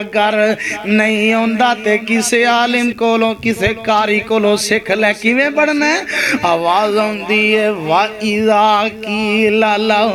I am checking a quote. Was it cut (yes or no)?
no